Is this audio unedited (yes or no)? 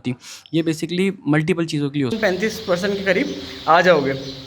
no